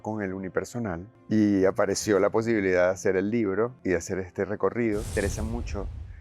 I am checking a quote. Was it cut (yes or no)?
yes